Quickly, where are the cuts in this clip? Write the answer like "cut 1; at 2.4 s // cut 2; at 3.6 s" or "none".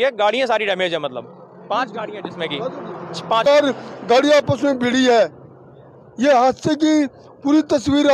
cut 1; at 3.4 s